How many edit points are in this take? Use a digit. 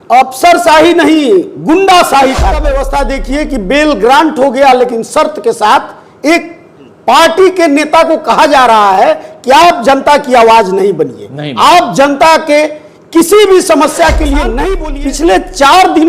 2